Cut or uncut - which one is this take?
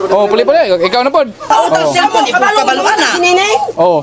cut